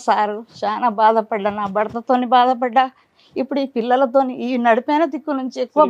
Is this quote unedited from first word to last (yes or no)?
yes